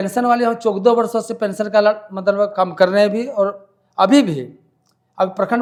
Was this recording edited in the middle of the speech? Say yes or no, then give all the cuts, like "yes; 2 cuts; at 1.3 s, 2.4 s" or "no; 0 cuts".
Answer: no; 0 cuts